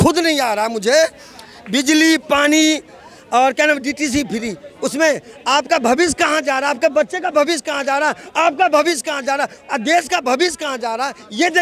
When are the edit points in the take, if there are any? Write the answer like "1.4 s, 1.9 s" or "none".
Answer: none

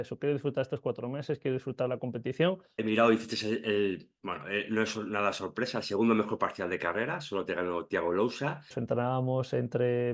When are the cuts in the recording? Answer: 2.7 s, 8.7 s

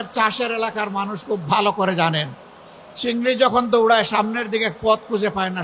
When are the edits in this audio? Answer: none

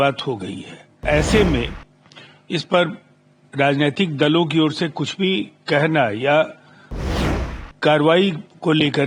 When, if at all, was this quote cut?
1.0 s

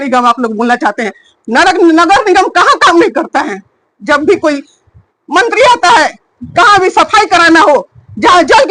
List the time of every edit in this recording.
none

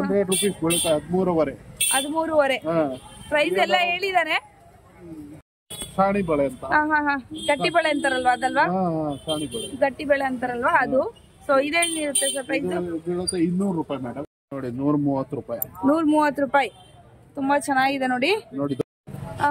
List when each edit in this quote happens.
14.1 s, 18.8 s

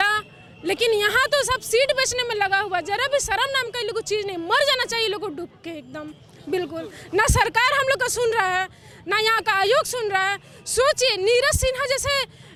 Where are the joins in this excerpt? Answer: none

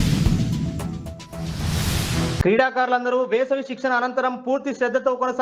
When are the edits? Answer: 2.4 s

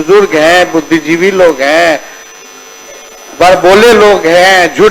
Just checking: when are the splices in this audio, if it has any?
none

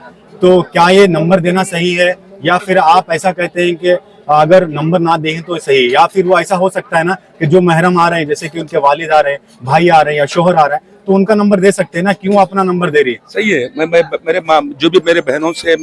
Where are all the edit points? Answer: none

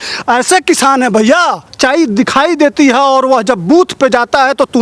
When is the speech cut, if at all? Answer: 1.7 s

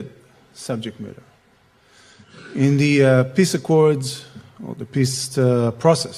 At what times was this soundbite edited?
none

